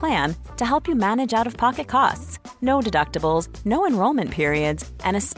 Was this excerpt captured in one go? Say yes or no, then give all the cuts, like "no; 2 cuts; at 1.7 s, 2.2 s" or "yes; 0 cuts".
yes; 0 cuts